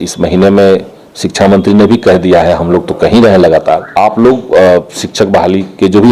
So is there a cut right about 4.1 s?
yes; 1 cut; at 4.1 s

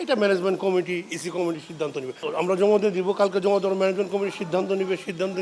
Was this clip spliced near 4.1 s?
no; 1 cut; at 2.3 s

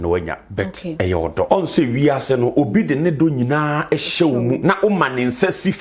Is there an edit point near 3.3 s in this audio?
no; 2 cuts; at 1.5 s, 4.6 s

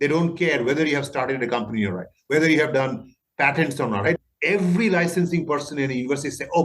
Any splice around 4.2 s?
yes; 1 cut; at 4.2 s

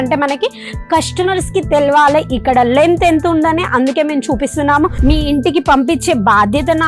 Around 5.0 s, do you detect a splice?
yes; 1 cut; at 5.0 s

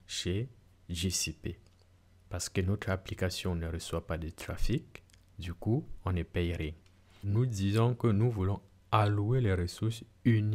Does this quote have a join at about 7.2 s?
yes; 1 cut; at 7.2 s

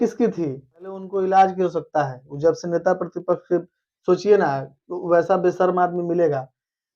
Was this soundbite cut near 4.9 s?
no; 1 cut; at 1.1 s

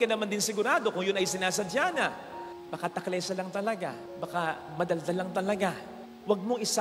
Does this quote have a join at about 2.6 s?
no; 0 cuts

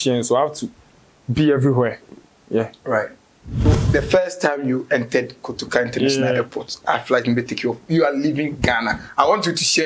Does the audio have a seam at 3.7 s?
yes; 1 cut; at 3.7 s

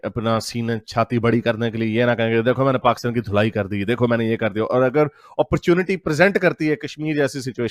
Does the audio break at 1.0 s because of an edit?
no; 0 cuts

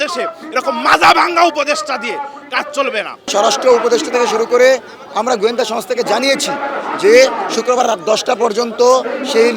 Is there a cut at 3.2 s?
yes; 1 cut; at 3.2 s

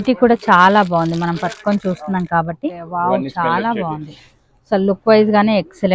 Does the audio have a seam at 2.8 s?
yes; 1 cut; at 2.8 s

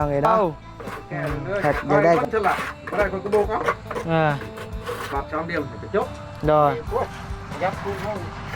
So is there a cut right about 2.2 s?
yes; 1 cut; at 2.2 s

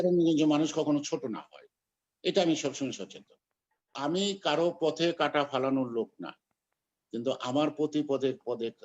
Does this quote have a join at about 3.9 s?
yes; 1 cut; at 3.9 s

